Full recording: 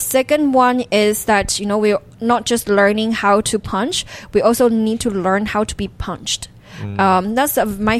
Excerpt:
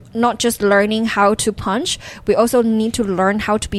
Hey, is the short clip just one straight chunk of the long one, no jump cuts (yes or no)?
yes